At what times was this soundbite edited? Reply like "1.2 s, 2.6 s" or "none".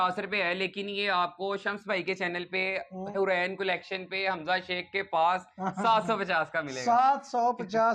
none